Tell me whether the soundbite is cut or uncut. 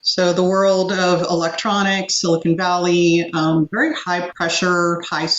cut